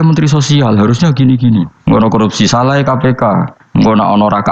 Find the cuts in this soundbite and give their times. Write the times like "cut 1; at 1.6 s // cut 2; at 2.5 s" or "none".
cut 1; at 1.7 s // cut 2; at 3.6 s